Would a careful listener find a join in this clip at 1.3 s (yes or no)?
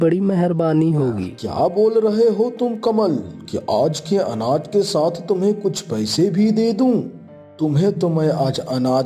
yes